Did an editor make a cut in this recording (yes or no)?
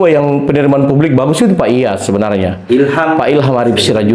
no